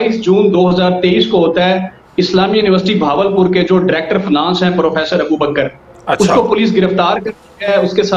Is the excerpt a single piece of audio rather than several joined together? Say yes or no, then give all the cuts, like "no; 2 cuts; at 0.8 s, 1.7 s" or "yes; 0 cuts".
yes; 0 cuts